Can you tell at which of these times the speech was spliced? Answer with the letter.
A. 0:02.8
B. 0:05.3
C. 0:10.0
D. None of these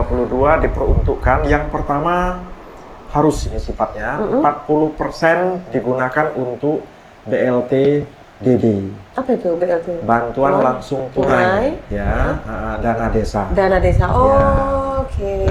D